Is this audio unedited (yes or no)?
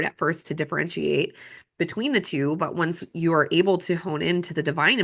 yes